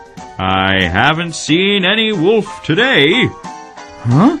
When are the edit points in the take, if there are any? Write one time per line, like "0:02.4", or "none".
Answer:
0:01.3